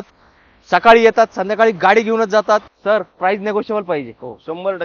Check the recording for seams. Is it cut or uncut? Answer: uncut